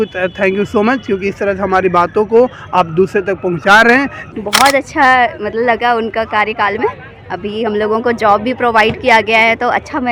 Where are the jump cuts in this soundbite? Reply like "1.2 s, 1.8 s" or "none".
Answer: 4.2 s